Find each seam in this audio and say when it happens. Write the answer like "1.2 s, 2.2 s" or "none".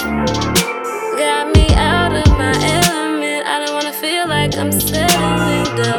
none

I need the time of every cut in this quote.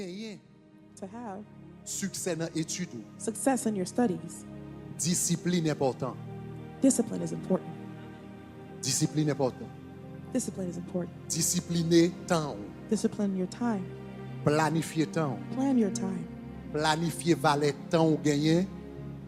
none

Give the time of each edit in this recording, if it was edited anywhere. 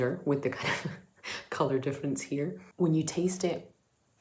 2.6 s

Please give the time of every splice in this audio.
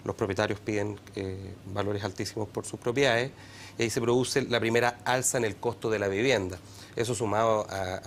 none

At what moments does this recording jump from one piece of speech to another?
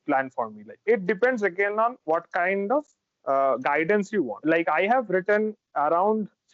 0.8 s, 4.3 s

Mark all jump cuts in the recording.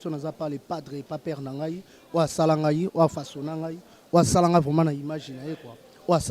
none

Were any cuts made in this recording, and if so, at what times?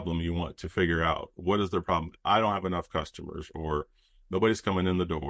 none

